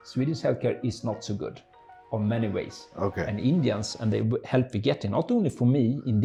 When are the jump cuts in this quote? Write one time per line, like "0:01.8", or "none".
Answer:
none